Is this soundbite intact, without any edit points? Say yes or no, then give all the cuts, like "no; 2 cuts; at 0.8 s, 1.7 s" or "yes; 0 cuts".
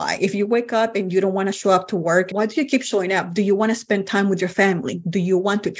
no; 1 cut; at 2.3 s